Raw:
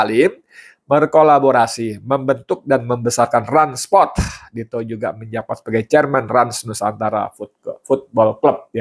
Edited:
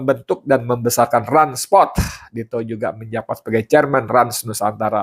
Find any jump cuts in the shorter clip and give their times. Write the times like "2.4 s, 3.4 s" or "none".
none